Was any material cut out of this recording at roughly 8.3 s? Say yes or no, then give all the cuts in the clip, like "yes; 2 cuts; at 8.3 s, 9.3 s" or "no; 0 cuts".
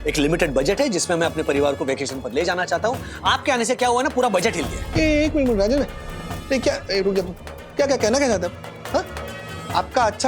no; 1 cut; at 4.8 s